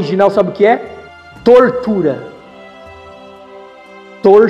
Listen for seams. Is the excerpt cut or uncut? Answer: uncut